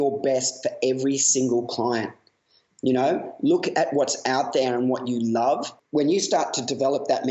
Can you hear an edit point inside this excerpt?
yes; 1 cut; at 5.7 s

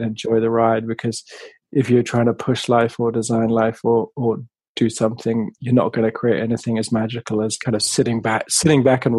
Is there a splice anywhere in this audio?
yes; 1 cut; at 7.6 s

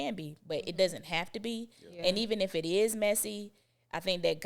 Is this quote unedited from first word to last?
yes; 0 cuts

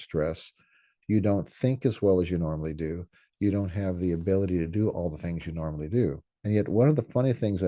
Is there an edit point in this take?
yes; 1 cut; at 6.3 s

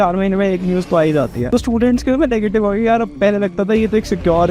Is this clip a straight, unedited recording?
no; 1 cut; at 1.4 s

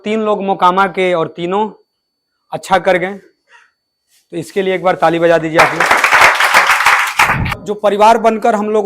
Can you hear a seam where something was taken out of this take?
yes; 1 cut; at 7.6 s

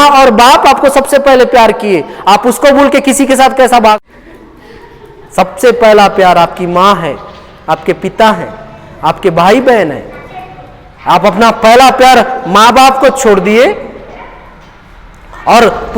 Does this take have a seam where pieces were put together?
yes; 1 cut; at 4.0 s

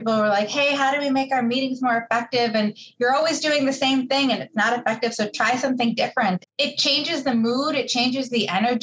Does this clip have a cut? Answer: yes; 1 cut; at 6.4 s

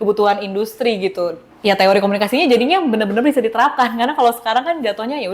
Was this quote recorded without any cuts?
no; 1 cut; at 1.5 s

